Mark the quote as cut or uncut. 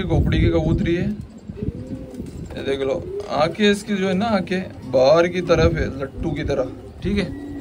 uncut